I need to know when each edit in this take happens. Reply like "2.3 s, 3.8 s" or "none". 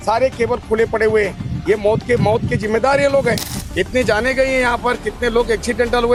none